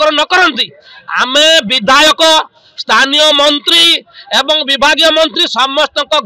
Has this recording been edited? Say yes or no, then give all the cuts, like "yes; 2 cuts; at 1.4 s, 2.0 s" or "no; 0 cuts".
no; 0 cuts